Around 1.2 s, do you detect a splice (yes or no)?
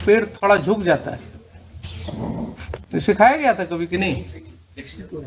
no